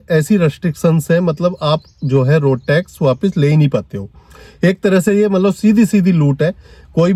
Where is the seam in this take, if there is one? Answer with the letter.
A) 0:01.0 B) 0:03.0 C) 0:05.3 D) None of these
D